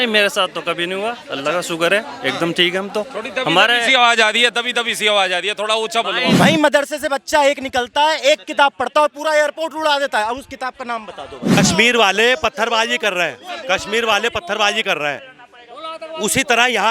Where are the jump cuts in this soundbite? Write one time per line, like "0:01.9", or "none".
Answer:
0:06.3
0:11.6